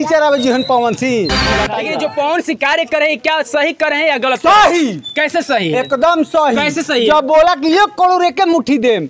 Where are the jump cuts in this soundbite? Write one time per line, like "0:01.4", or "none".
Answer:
0:01.7